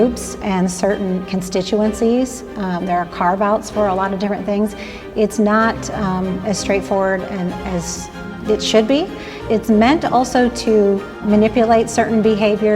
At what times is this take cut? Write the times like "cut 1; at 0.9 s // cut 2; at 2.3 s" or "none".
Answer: cut 1; at 8.2 s // cut 2; at 9.3 s // cut 3; at 11.2 s